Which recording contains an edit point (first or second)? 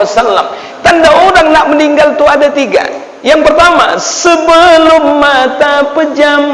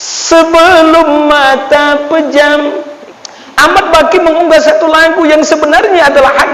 second